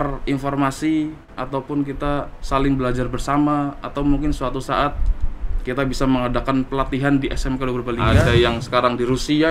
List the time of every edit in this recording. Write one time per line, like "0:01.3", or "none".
0:08.3